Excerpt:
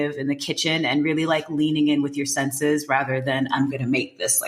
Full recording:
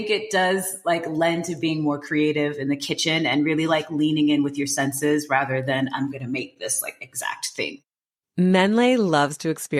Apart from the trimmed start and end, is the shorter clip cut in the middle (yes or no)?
no